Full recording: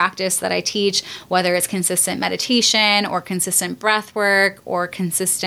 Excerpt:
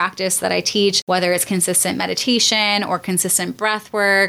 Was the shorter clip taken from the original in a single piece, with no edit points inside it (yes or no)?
no